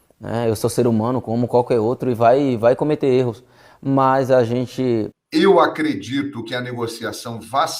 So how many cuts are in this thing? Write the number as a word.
one